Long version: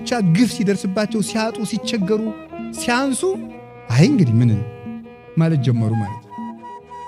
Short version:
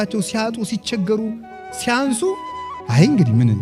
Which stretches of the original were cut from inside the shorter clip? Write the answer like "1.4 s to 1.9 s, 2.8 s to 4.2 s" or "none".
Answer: none